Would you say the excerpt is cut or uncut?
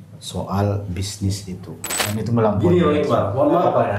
cut